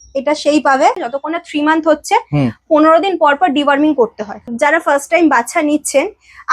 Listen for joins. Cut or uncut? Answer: cut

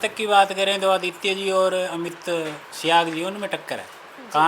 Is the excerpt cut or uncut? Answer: cut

